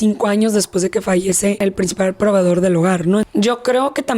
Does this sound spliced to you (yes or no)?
yes